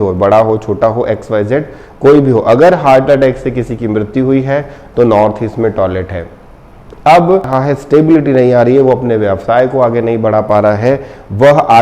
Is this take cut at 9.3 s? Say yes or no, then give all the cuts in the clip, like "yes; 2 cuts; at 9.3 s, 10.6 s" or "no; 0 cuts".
no; 1 cut; at 7.5 s